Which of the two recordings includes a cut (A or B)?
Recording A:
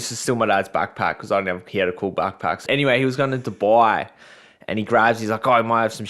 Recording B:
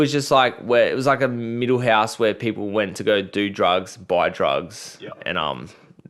A